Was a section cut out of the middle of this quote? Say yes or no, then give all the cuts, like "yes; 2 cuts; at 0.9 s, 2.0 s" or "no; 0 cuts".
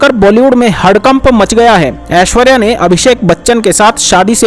yes; 1 cut; at 2.1 s